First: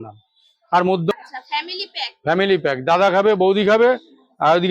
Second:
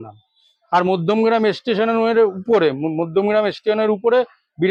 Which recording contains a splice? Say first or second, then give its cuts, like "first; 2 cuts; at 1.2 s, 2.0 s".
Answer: first; 1 cut; at 1.1 s